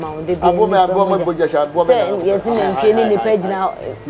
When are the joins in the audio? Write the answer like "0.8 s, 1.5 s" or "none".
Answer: none

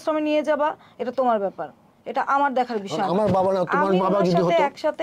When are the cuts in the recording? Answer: none

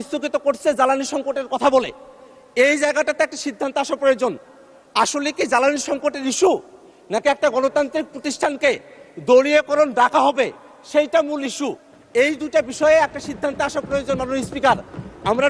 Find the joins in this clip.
none

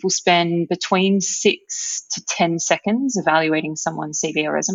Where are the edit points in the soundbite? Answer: none

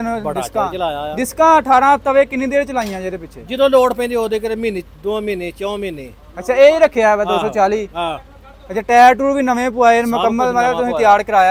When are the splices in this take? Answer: none

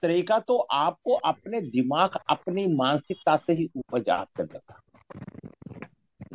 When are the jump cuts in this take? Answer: none

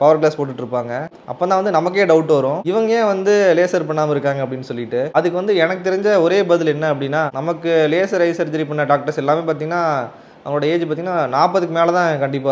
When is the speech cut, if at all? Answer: none

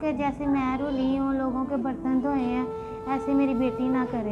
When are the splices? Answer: none

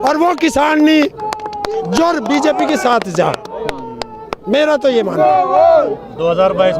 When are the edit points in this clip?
none

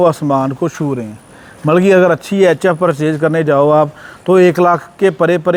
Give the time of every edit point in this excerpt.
none

